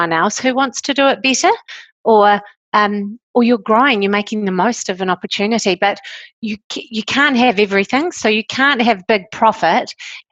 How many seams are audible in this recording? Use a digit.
0